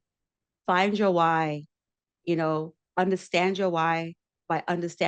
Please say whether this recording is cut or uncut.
uncut